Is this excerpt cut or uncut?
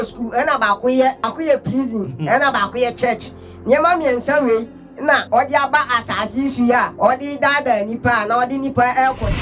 cut